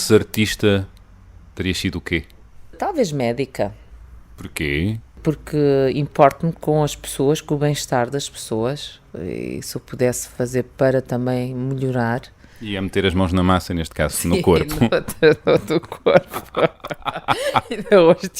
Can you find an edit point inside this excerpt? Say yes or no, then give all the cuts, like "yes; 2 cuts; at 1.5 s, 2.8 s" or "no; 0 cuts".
yes; 2 cuts; at 2.8 s, 5.2 s